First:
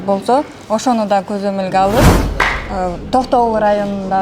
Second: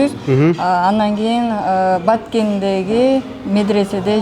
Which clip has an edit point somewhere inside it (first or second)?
first